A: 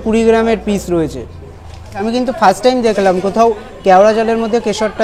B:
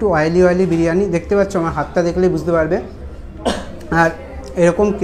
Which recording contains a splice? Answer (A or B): A